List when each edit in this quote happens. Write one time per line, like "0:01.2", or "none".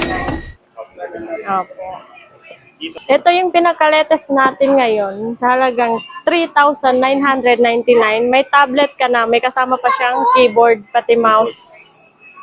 0:02.9